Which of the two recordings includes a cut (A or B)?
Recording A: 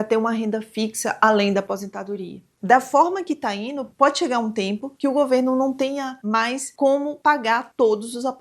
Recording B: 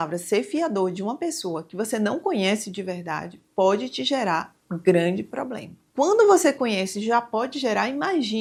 A